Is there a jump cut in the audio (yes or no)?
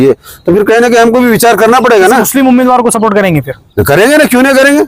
no